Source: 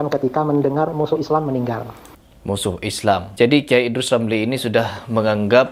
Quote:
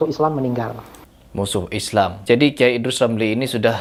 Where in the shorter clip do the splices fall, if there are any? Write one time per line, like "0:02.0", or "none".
none